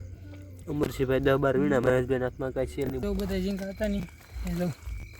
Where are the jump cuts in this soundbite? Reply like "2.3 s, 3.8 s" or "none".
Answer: 3.0 s